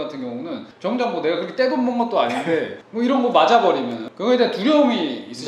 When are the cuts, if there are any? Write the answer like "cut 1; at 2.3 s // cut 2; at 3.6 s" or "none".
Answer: cut 1; at 4.0 s